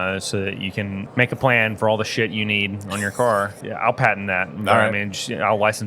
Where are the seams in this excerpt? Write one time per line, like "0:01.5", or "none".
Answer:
0:01.1
0:03.6